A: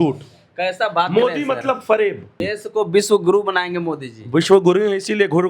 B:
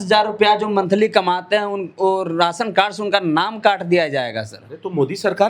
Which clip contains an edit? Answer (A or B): A